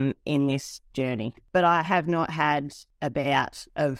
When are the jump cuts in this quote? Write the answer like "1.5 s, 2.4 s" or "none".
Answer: 1.3 s, 2.8 s